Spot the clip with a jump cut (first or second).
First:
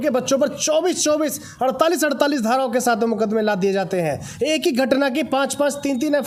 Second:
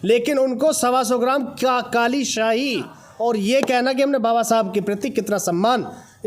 second